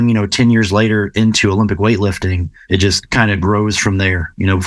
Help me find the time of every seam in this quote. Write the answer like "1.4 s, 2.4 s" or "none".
2.5 s